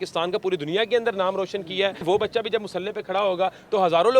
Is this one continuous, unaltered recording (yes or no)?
no